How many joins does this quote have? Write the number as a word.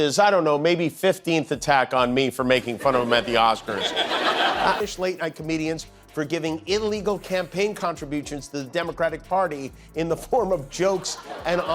one